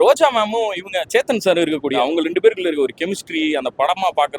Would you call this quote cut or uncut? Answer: cut